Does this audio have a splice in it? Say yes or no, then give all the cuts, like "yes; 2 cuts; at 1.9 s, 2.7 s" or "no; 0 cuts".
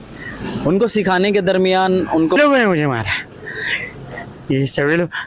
yes; 1 cut; at 2.4 s